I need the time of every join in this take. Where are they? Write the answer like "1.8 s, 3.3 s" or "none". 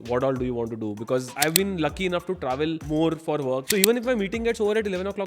1.3 s, 2.8 s, 3.6 s